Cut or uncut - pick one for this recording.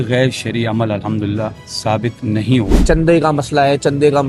cut